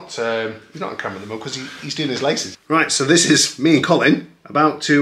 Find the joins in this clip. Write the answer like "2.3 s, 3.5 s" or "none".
2.5 s